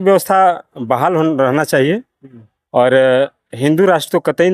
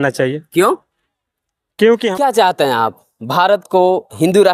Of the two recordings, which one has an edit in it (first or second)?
second